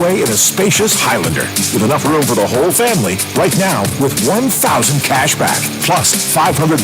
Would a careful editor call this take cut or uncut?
uncut